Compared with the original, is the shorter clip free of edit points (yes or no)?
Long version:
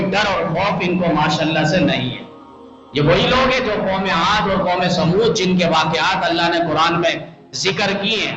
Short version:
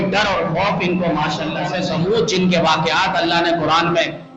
no